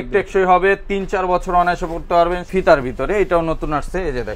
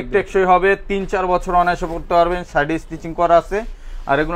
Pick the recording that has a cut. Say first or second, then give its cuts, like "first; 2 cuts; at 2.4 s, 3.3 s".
first; 1 cut; at 2.4 s